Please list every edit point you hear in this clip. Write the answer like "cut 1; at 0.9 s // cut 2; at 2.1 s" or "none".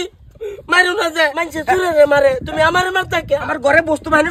cut 1; at 1.5 s // cut 2; at 3.5 s